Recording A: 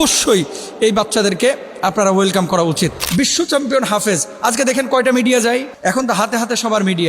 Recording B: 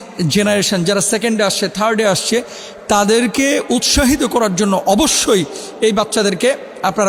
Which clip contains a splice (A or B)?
A